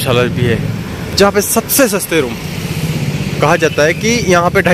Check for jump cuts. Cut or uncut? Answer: uncut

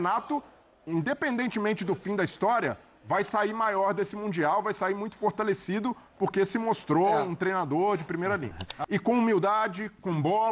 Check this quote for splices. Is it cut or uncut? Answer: cut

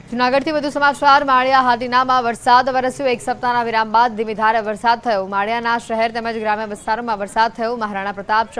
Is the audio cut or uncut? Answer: cut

